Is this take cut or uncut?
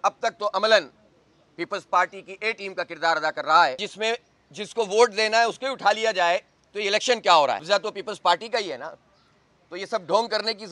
cut